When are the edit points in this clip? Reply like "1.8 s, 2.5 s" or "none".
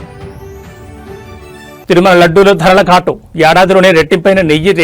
none